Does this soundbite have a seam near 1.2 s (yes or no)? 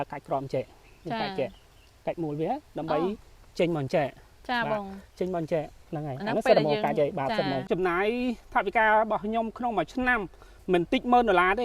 no